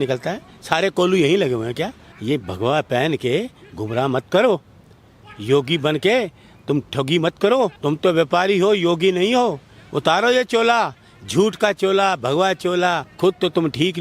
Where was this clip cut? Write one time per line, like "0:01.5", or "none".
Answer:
0:02.1
0:07.8
0:13.1